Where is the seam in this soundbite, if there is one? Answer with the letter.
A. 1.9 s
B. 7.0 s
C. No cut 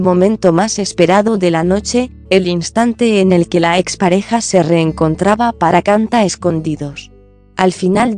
C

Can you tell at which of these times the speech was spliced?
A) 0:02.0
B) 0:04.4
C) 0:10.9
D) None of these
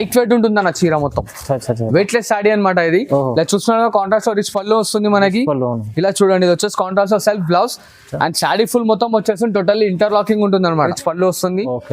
C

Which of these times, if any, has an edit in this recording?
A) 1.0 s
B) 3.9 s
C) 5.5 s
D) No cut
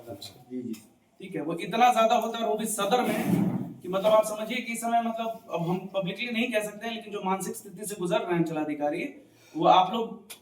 D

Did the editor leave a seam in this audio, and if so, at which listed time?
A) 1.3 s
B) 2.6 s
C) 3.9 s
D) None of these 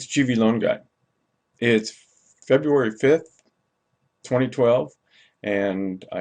C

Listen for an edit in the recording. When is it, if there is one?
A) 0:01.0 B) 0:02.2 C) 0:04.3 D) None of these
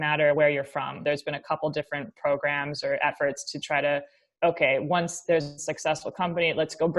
A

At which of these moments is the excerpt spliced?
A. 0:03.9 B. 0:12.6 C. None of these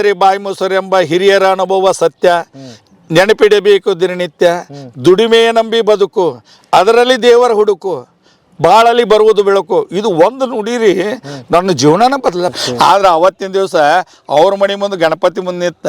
B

